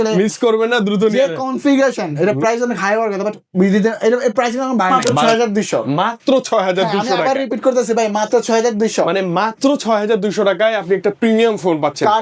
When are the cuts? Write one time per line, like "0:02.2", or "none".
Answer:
0:04.9